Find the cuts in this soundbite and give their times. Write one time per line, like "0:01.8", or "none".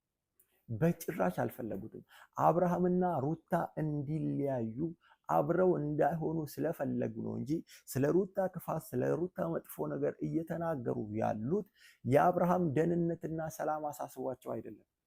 none